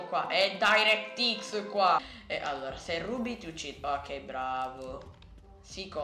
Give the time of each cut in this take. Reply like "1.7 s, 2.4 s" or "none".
none